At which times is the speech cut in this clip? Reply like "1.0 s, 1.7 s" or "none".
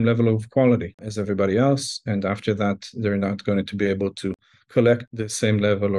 none